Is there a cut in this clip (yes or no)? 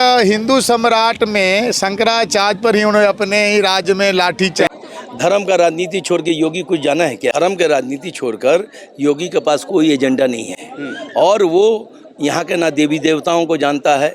yes